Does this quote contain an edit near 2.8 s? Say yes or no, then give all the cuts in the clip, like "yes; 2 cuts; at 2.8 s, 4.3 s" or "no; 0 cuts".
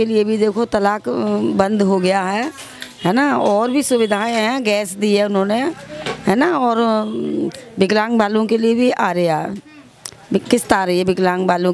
no; 0 cuts